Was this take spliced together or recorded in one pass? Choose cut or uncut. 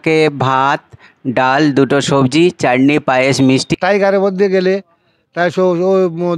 cut